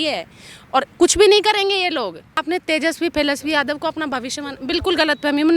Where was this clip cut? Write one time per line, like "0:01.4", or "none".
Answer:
0:02.4